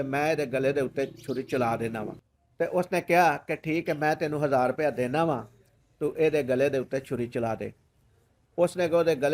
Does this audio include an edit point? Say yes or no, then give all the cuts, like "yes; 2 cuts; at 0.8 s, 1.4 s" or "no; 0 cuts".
no; 0 cuts